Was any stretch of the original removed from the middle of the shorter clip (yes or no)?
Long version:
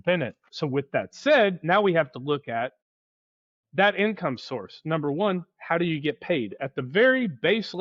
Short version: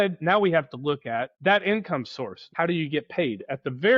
yes